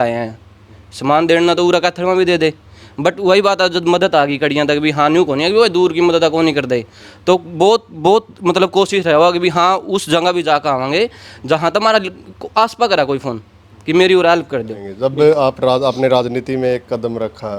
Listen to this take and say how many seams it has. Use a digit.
1